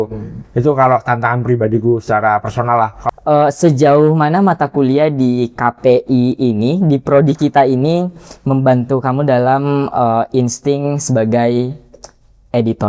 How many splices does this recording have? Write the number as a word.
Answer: one